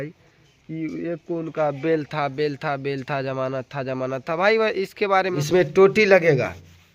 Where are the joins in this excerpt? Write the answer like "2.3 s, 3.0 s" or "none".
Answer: 5.4 s